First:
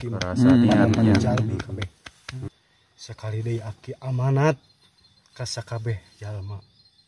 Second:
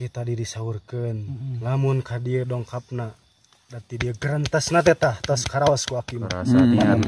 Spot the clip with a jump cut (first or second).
first